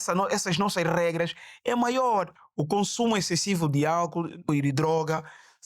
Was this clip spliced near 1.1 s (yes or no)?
no